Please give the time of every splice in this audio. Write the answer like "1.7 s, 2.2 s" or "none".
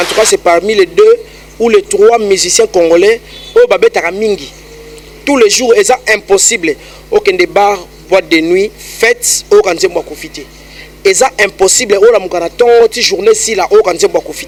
none